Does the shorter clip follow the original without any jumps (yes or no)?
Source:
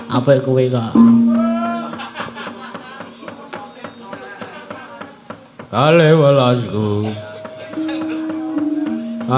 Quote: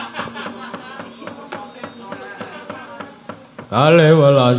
yes